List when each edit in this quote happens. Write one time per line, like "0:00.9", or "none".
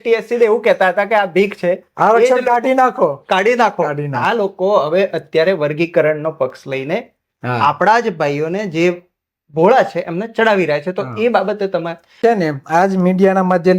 0:12.2